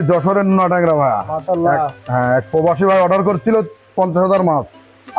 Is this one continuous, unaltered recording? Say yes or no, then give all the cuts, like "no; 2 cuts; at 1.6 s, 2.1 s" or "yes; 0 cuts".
yes; 0 cuts